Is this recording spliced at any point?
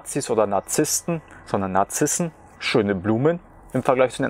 no; 0 cuts

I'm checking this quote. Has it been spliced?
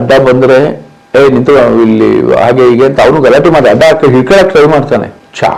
no; 0 cuts

